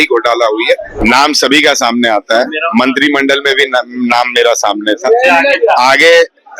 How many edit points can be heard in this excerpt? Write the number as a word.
one